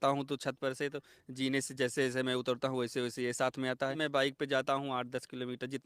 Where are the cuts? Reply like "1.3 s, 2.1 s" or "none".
4.0 s